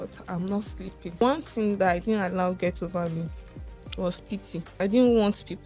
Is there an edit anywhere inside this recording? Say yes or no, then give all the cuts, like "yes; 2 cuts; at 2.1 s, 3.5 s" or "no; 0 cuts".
yes; 2 cuts; at 1.2 s, 4.7 s